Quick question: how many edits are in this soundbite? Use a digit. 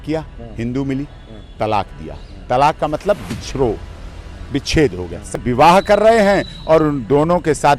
1